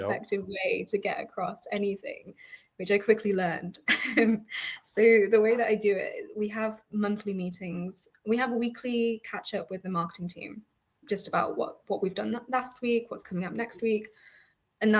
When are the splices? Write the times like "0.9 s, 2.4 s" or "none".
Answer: 11.0 s